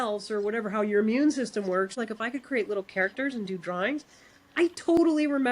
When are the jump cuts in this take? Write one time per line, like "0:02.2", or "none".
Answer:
0:02.0